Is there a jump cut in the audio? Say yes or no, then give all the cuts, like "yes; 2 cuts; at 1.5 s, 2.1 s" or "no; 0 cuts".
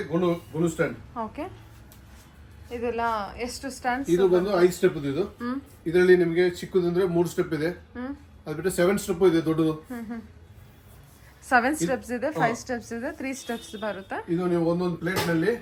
no; 0 cuts